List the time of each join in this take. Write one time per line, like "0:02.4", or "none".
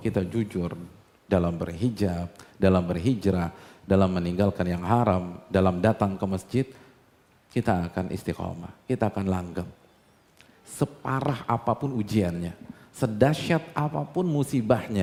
none